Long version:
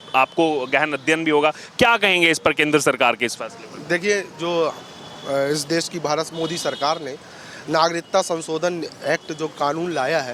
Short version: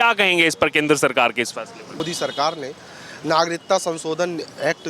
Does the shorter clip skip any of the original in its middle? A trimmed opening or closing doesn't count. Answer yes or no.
yes